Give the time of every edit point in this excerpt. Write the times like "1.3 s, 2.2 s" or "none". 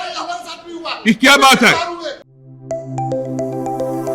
2.3 s